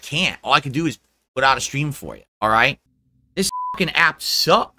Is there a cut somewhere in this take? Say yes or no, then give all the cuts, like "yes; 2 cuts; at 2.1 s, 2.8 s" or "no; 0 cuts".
yes; 1 cut; at 3.5 s